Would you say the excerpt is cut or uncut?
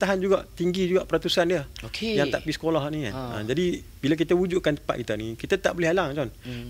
uncut